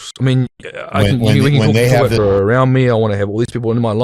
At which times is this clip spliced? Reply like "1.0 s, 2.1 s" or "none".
2.2 s